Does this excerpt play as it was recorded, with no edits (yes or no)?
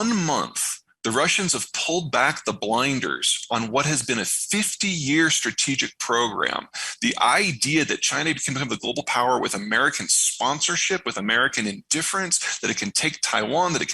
yes